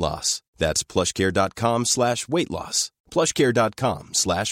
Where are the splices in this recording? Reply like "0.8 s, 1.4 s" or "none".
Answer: none